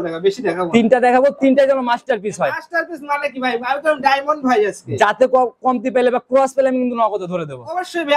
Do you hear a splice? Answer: no; 0 cuts

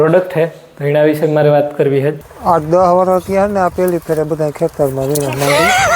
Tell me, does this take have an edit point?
yes; 1 cut; at 2.3 s

